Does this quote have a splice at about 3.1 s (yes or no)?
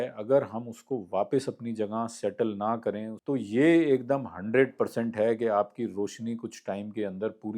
yes